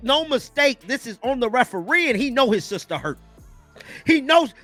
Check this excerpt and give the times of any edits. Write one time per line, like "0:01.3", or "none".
none